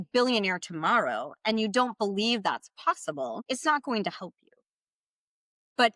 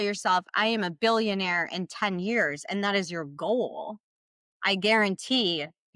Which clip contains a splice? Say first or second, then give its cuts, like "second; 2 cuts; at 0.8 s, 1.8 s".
first; 1 cut; at 3.4 s